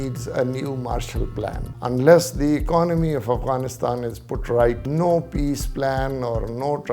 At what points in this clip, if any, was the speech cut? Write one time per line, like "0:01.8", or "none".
0:01.7
0:04.8

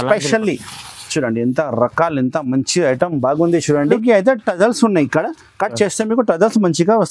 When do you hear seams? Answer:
0:03.9

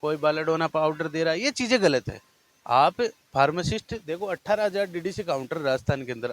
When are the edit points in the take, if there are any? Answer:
none

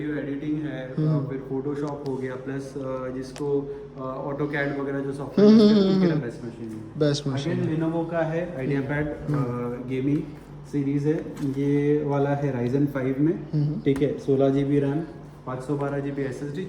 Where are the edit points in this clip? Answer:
none

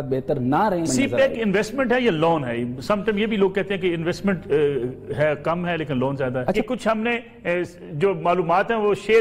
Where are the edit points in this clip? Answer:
0:01.0
0:06.6

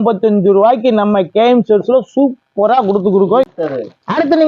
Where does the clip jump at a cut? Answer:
0:03.5

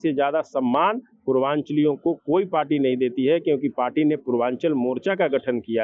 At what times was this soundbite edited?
none

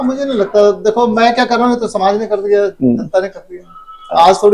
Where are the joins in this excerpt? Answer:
none

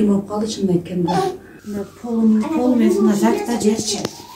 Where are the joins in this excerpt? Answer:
0:01.5

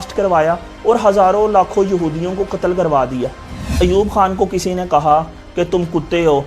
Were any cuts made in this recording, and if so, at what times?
0:03.8

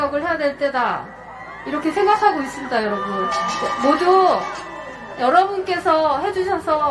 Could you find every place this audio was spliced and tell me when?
none

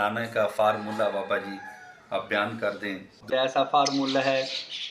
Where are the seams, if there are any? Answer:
0:03.3

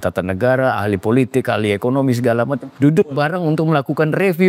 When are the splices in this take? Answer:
0:02.6

